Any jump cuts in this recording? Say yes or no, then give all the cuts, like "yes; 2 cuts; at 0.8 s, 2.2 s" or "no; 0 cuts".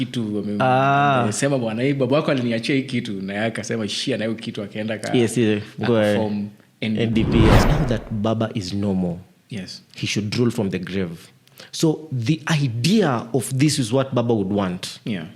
yes; 1 cut; at 7.6 s